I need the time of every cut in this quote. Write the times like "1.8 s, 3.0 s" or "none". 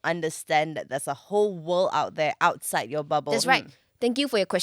3.3 s

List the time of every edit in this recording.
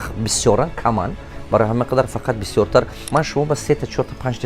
3.0 s

